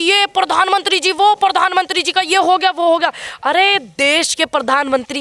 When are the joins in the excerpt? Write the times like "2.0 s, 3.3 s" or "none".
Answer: none